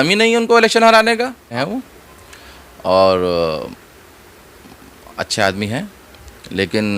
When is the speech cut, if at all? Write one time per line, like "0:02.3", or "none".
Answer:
0:01.5

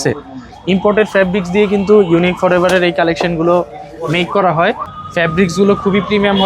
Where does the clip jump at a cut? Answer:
0:04.9

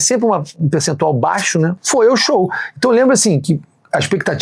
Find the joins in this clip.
0:01.8

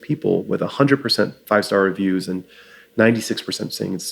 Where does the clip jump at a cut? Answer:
0:01.4

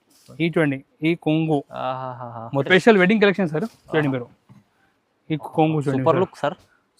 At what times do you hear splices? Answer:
0:02.7

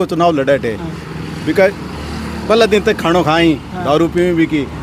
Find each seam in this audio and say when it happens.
none

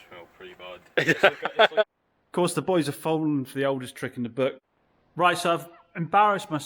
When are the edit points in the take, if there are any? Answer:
0:01.8
0:04.7

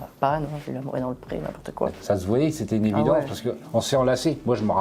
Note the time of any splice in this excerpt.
0:02.0

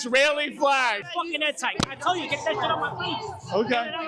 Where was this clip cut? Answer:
0:01.1

